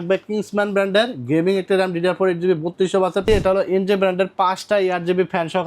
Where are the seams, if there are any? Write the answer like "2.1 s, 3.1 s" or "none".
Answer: 3.2 s